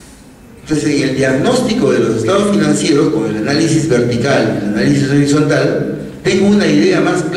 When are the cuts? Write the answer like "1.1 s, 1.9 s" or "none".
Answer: none

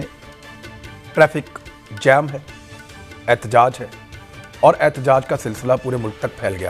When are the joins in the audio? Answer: none

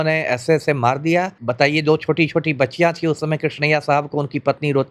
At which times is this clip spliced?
1.4 s

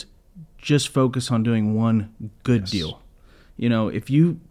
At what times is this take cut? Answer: none

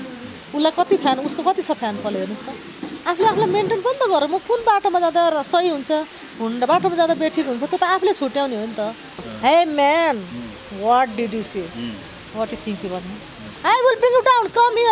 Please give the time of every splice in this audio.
9.2 s

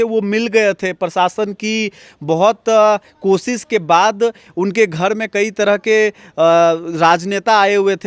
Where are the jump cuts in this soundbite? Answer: none

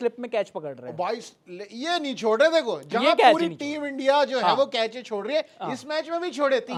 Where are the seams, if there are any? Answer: none

